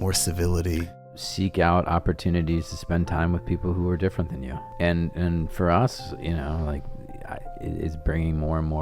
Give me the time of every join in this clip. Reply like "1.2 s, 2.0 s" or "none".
1.2 s, 4.6 s